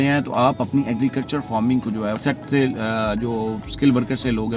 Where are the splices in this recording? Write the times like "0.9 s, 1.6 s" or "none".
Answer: 2.2 s